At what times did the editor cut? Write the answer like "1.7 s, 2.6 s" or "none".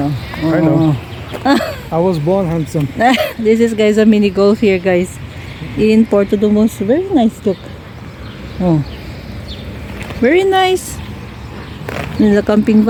none